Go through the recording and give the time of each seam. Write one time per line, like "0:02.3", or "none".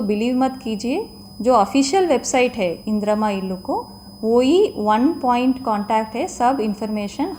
none

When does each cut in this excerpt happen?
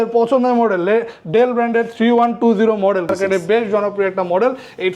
0:03.1

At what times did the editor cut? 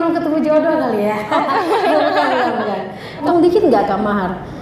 0:03.2

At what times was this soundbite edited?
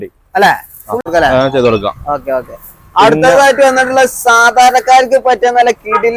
0:01.0

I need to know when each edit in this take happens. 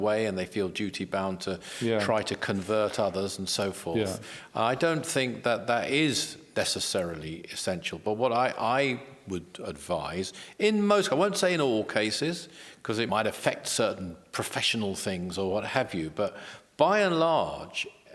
0:13.1

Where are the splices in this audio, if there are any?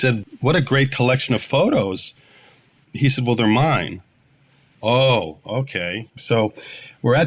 0:06.1

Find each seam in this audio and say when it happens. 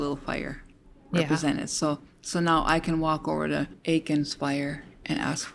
0:03.7

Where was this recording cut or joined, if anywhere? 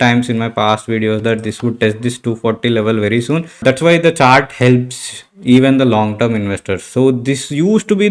0:03.6

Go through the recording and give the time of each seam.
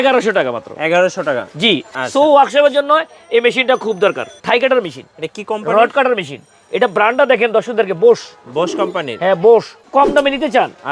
0:01.9
0:04.4
0:09.8

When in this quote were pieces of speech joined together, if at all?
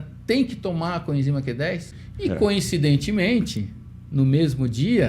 0:01.9

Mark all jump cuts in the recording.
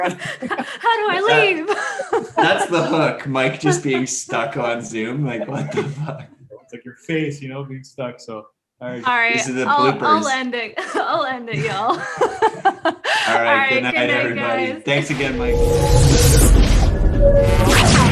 0:15.4

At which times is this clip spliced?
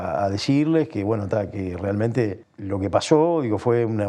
0:02.5

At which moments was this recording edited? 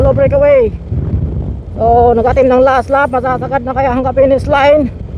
none

